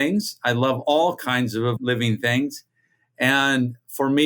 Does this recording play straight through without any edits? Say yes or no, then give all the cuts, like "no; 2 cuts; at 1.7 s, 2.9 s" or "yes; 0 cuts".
no; 1 cut; at 1.8 s